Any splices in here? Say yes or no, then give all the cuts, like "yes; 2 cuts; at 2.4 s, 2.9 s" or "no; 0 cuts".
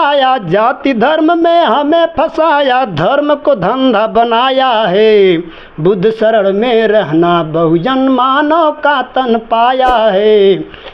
no; 0 cuts